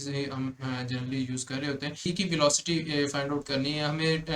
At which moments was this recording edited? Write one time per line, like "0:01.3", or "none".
0:02.1